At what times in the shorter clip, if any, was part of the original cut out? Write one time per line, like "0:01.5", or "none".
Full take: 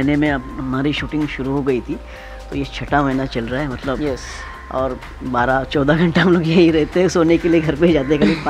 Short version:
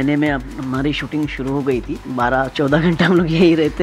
0:02.0